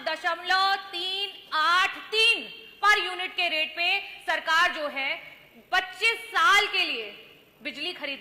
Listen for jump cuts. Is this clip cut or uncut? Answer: uncut